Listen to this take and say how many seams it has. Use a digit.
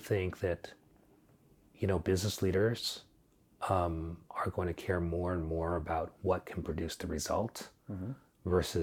0